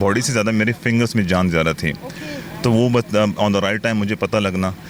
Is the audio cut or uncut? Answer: uncut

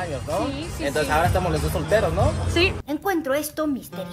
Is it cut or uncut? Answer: uncut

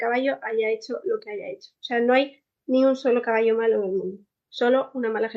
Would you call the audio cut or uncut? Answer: uncut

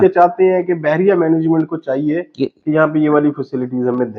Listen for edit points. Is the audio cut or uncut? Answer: uncut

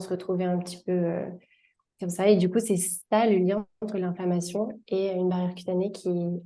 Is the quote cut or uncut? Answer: uncut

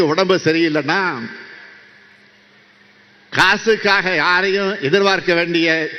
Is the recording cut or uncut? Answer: uncut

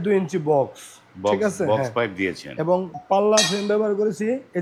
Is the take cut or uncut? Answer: uncut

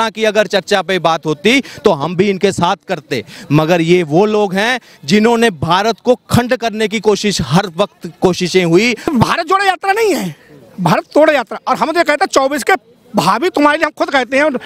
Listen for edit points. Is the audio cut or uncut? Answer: cut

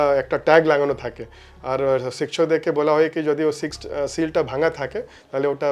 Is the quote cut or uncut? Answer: uncut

